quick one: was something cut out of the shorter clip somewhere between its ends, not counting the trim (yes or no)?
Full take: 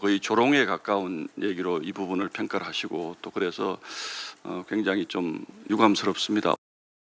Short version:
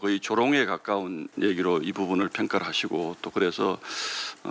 no